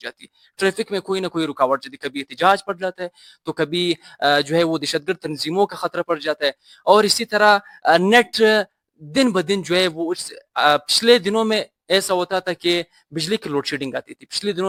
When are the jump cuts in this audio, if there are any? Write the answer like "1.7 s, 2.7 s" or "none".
none